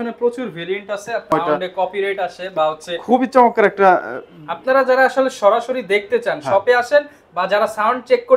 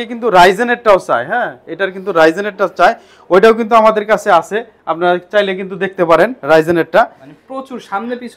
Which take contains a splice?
first; 1 cut; at 1.3 s

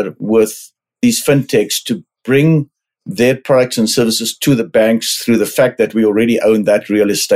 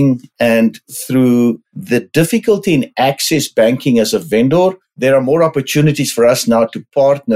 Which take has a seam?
second; 3 cuts; at 0.9 s, 1.7 s, 4.9 s

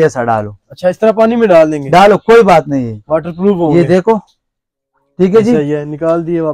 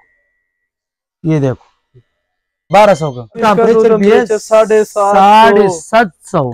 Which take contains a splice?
second; 2 cuts; at 2.7 s, 3.4 s

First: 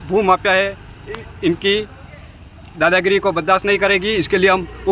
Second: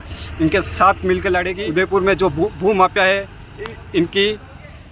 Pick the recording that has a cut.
second; 1 cut; at 1.6 s

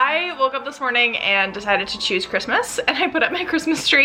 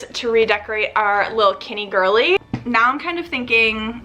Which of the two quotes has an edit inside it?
second; 1 cut; at 2.4 s

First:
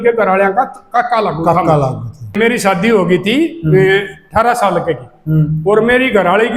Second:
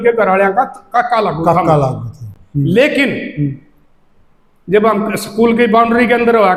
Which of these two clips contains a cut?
first; 1 cut; at 2.4 s

